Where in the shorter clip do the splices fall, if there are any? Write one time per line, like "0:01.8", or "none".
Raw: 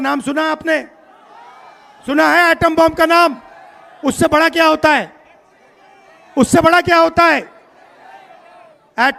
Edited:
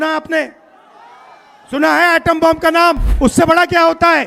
0:03.1